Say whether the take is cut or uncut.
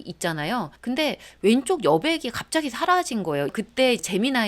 cut